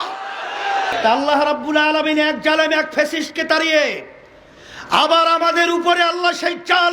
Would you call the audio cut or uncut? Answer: cut